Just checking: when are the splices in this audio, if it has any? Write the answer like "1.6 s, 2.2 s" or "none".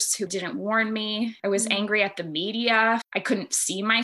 1.4 s, 3.1 s